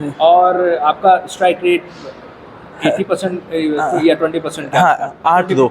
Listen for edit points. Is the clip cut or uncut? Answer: uncut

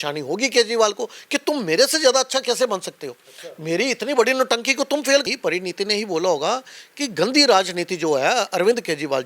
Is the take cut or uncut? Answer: cut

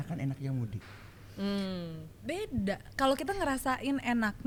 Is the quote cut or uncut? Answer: uncut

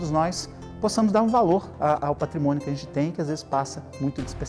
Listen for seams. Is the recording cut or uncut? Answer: uncut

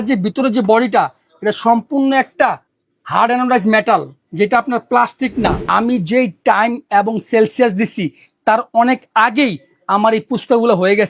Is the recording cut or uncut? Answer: cut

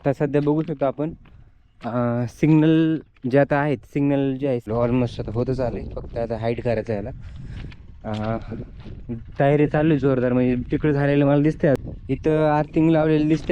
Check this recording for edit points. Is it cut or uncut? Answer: cut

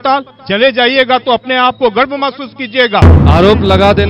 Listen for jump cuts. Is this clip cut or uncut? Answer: cut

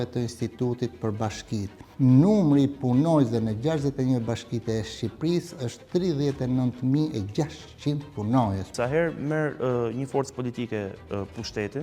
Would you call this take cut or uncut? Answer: cut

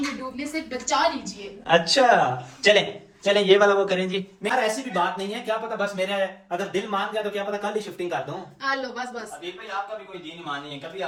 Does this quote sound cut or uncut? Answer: uncut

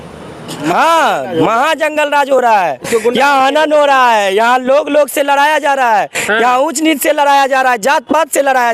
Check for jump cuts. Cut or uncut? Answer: uncut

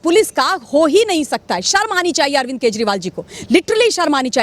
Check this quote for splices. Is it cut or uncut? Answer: uncut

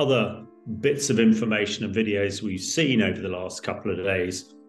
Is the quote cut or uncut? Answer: uncut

